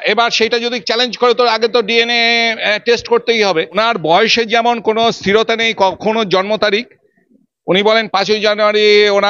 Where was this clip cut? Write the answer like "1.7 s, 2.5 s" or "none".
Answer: 3.8 s

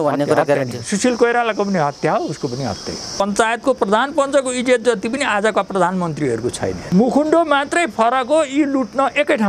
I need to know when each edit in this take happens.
3.2 s, 6.8 s

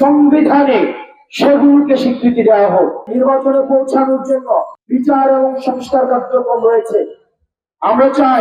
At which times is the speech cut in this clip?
3.0 s, 4.8 s

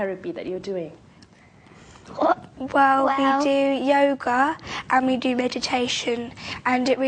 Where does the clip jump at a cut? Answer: none

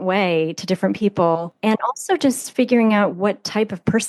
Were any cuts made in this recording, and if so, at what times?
1.5 s

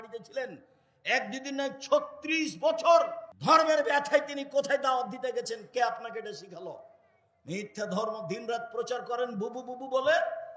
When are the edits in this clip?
3.3 s

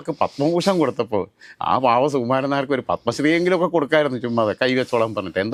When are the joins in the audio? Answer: none

